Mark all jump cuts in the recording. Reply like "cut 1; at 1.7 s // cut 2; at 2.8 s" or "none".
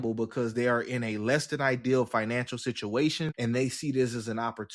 cut 1; at 3.3 s